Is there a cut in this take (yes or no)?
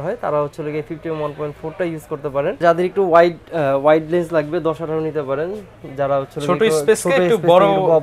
yes